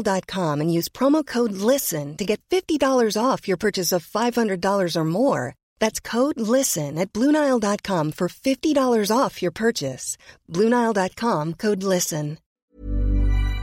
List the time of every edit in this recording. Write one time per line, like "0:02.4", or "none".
0:12.5